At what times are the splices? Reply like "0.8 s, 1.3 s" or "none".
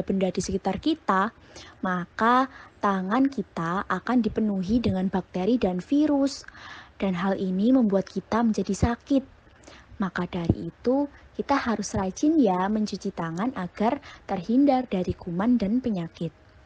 14.7 s